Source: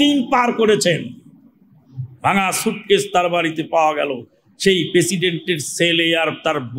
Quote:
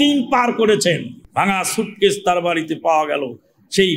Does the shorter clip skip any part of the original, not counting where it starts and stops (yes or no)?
yes